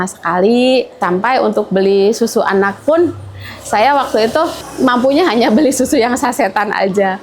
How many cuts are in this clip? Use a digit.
2